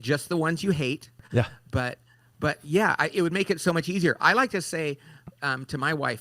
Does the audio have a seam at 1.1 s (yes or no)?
yes